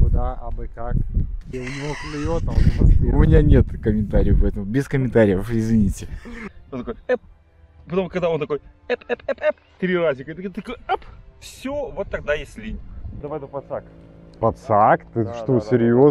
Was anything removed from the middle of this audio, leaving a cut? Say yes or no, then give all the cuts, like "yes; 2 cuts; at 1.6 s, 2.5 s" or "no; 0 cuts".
yes; 2 cuts; at 6.5 s, 13.2 s